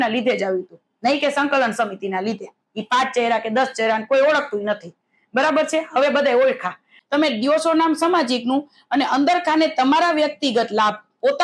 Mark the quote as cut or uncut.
cut